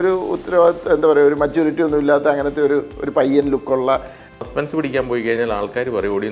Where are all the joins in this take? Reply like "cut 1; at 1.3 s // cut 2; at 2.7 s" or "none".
cut 1; at 4.4 s